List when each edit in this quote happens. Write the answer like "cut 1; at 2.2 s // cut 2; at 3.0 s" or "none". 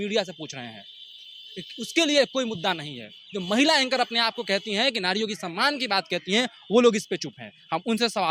none